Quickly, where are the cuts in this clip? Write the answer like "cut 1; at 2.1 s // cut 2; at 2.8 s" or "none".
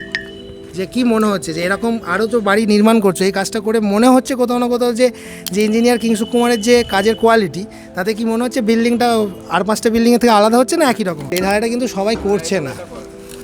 cut 1; at 11.3 s